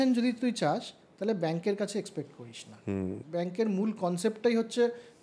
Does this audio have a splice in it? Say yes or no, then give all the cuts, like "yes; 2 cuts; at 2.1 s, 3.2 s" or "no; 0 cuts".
yes; 1 cut; at 3.2 s